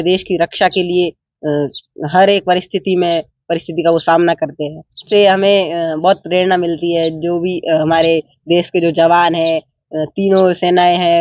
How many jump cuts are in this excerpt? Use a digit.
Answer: 1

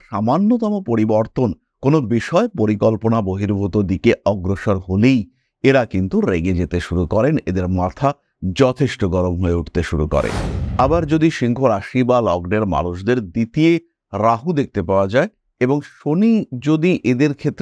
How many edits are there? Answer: 1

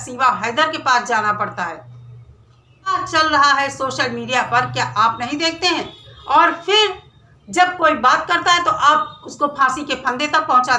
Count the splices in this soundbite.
1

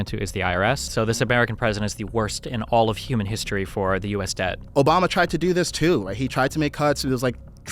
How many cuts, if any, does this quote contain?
2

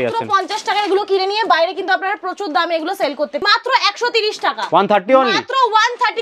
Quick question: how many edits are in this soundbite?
1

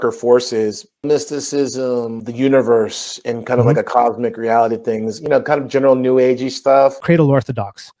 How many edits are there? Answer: 3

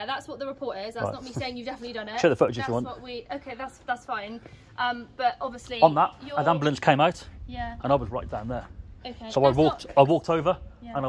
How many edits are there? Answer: 0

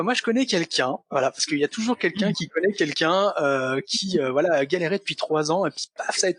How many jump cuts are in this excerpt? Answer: 0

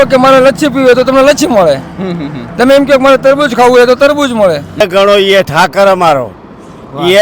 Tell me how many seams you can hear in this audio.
1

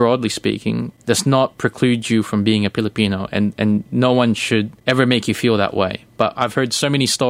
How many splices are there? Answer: 2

